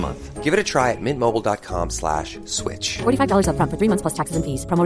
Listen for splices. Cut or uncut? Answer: uncut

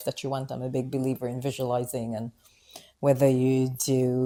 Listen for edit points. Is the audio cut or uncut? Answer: uncut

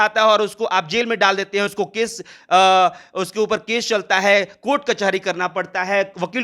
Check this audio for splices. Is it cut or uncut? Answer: uncut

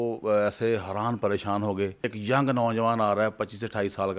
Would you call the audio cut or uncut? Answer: cut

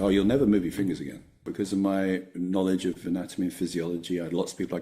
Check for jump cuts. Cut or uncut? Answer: cut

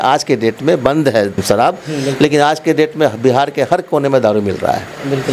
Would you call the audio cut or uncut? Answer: cut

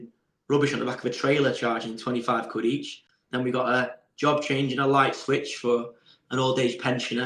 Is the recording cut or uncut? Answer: uncut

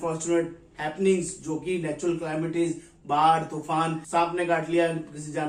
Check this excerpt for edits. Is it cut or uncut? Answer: uncut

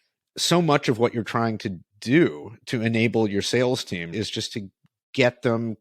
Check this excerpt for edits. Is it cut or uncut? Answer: cut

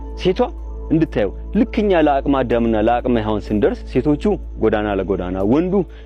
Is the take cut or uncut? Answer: uncut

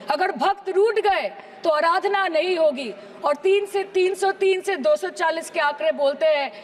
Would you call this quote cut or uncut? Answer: uncut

